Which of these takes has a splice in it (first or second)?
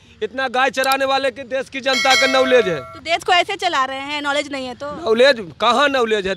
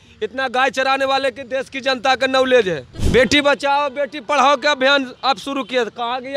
second